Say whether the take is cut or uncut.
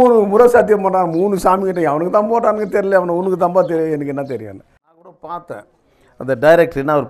cut